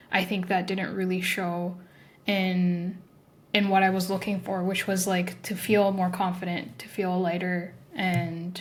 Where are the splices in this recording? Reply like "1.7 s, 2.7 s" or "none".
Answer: none